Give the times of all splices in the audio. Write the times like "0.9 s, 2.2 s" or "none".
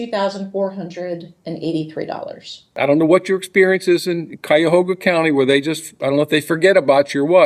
2.7 s